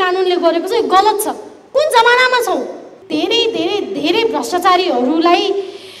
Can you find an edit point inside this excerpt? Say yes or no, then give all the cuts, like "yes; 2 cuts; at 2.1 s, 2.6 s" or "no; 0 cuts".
yes; 1 cut; at 2.9 s